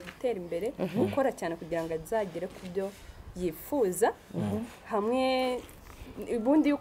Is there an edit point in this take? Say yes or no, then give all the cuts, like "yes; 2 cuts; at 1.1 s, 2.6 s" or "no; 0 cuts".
no; 0 cuts